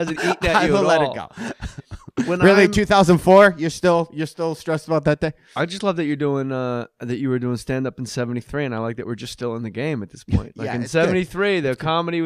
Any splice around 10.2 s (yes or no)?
yes